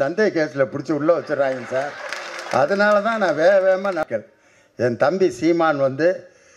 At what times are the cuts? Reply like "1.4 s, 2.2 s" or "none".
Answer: 4.0 s